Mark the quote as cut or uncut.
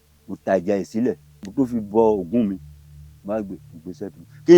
cut